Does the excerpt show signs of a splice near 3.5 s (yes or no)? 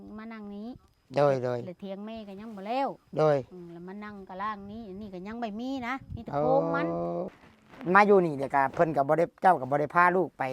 no